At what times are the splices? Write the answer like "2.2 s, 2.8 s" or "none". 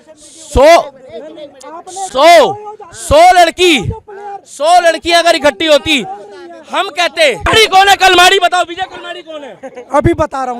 7.5 s